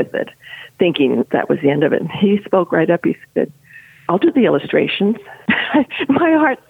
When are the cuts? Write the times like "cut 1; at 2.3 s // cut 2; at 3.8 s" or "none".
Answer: cut 1; at 1.3 s // cut 2; at 5.3 s